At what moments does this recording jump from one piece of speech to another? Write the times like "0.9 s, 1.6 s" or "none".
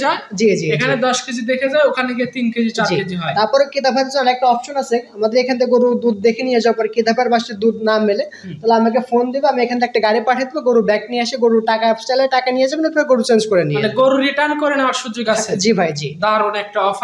none